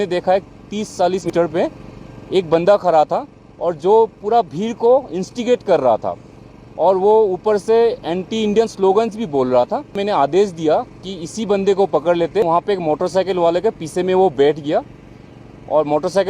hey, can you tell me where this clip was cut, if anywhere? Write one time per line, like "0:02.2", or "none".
0:01.3
0:10.0
0:12.4